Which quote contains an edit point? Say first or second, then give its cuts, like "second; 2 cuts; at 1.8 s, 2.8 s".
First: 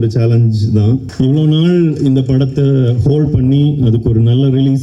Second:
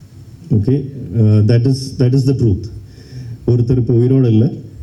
first; 1 cut; at 1.1 s